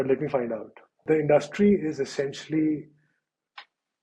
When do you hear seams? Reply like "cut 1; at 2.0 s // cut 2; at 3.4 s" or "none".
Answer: cut 1; at 1.0 s